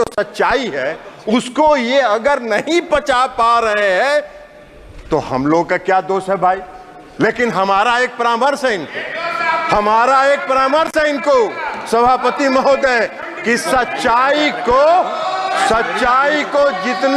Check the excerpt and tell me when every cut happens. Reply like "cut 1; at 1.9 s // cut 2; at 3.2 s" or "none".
none